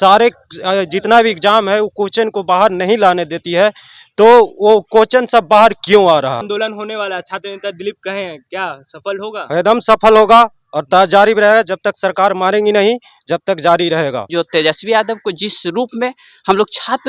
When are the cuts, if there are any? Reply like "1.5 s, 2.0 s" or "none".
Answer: 6.5 s, 14.2 s